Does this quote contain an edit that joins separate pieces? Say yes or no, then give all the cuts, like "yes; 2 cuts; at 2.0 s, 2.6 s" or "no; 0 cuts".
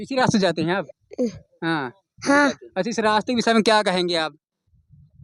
no; 0 cuts